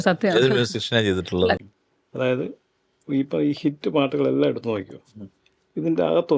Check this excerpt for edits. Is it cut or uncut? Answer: cut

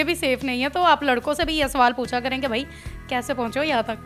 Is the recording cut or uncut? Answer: uncut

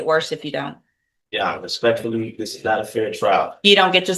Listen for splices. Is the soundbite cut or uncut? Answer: uncut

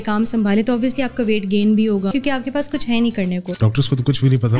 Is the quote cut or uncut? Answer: cut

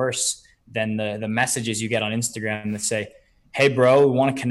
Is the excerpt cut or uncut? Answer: uncut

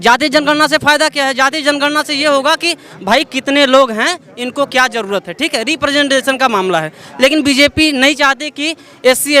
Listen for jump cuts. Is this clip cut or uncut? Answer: uncut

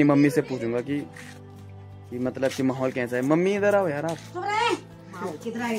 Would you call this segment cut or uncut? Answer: uncut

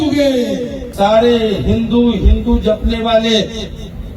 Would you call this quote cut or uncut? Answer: cut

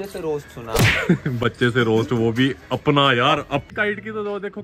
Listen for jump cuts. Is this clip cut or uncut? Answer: cut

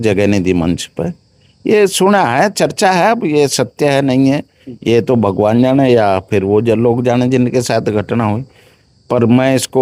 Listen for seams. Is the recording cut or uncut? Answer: uncut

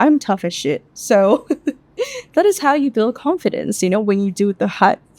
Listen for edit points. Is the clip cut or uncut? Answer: uncut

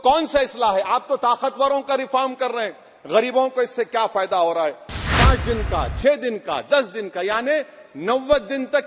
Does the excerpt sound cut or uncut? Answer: cut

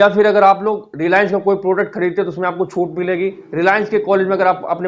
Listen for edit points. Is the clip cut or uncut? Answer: uncut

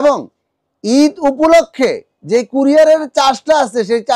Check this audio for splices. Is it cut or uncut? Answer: uncut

